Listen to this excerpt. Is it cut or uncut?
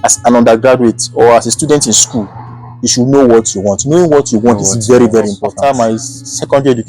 cut